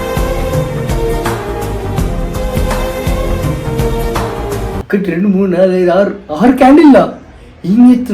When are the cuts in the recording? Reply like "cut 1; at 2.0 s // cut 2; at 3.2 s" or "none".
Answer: cut 1; at 4.7 s